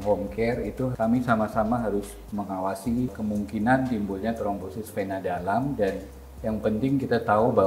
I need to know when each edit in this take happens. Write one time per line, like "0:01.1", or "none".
0:00.9
0:03.1